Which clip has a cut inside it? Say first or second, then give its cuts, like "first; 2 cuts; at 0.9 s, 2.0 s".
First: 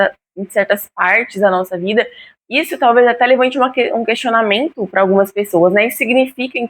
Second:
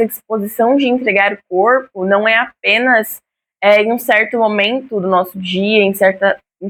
first; 1 cut; at 2.4 s